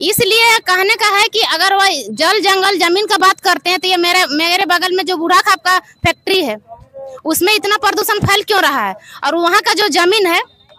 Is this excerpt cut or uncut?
uncut